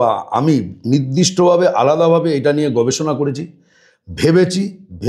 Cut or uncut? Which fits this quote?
uncut